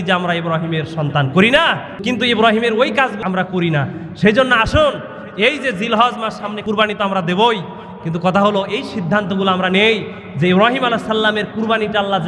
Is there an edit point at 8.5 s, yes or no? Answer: no